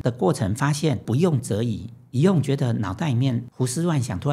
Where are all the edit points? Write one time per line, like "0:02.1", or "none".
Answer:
0:01.0
0:03.5